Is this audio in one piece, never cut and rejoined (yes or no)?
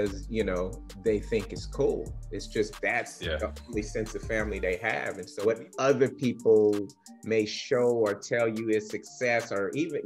no